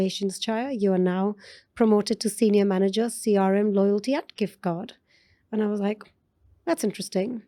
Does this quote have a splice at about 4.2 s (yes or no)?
no